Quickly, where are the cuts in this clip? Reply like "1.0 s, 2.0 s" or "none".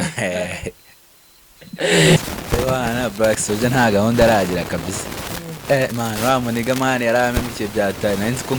2.2 s